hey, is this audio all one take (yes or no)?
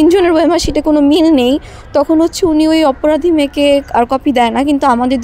yes